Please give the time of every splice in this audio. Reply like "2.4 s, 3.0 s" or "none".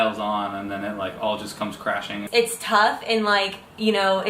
2.2 s